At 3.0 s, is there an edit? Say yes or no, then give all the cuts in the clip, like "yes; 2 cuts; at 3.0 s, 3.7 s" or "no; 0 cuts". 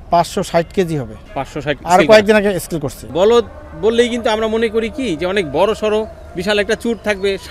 yes; 1 cut; at 3.0 s